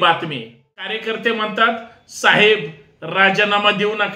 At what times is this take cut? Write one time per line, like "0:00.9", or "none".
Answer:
0:00.9